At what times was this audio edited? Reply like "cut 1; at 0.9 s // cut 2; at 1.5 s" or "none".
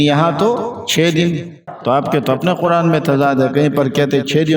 cut 1; at 1.6 s